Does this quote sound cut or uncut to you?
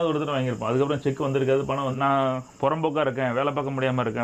cut